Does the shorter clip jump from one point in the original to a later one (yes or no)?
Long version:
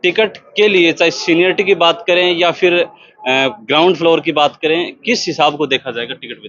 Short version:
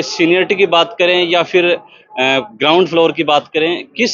no